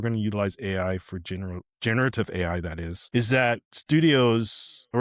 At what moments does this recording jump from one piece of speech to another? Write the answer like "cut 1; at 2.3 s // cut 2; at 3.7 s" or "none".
cut 1; at 2.9 s // cut 2; at 3.7 s